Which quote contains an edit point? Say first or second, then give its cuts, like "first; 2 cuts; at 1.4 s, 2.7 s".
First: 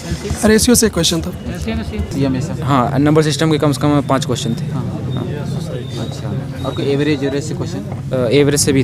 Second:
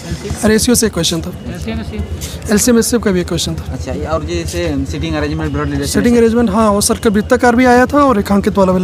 first; 1 cut; at 2.1 s